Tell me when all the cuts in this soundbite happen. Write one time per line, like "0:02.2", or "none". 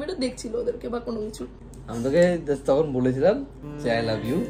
0:01.9